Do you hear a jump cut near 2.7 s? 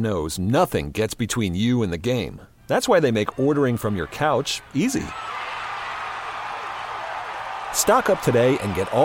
no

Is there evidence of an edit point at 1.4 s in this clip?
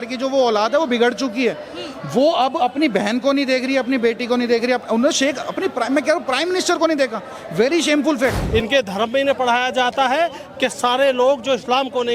no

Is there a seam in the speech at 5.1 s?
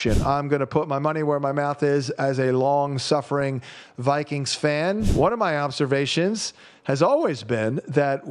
yes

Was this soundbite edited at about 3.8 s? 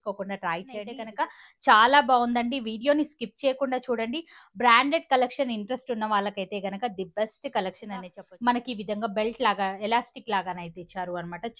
no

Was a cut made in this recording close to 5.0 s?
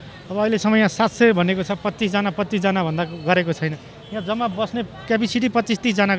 no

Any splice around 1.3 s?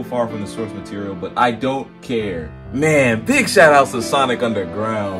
no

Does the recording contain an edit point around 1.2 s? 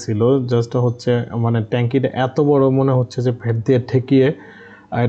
no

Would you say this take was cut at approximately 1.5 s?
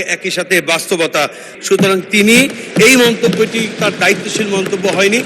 yes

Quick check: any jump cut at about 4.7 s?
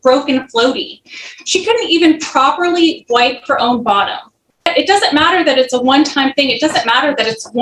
yes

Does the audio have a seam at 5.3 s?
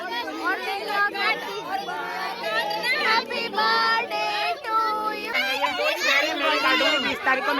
yes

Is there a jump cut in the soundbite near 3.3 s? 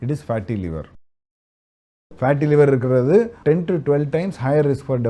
yes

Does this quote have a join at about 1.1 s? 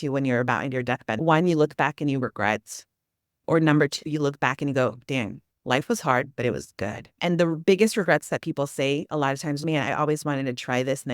yes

